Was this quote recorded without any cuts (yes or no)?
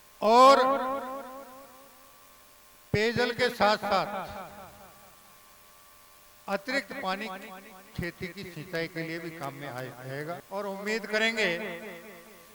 no